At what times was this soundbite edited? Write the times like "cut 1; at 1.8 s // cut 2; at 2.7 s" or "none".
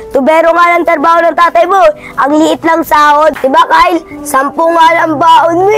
cut 1; at 3.4 s